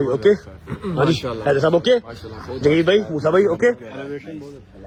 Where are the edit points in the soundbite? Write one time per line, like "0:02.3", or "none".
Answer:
none